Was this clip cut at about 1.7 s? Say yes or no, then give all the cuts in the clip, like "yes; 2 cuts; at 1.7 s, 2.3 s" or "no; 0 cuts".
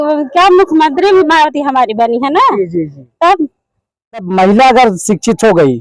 no; 1 cut; at 4.3 s